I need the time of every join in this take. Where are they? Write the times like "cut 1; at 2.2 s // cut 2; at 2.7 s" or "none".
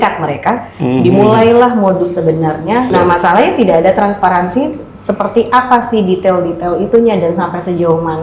cut 1; at 2.9 s